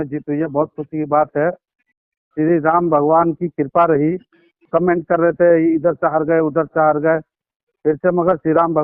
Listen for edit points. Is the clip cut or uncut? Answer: cut